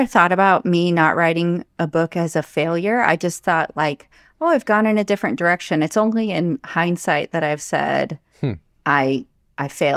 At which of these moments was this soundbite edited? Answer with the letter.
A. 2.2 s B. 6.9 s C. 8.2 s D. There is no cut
D